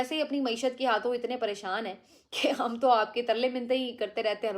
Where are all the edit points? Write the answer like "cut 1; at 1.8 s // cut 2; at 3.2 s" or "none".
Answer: cut 1; at 2.5 s